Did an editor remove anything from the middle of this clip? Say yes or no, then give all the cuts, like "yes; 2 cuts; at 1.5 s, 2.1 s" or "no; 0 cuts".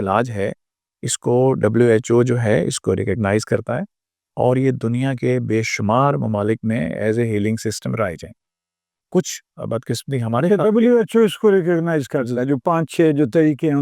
no; 0 cuts